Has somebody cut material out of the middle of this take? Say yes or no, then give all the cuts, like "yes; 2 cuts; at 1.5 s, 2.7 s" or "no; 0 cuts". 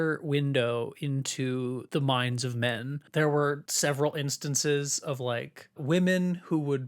yes; 3 cuts; at 1.8 s, 3.0 s, 3.7 s